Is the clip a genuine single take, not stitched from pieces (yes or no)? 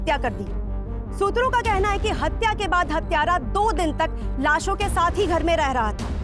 yes